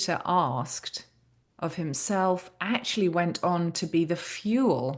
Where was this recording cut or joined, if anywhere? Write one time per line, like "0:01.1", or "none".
none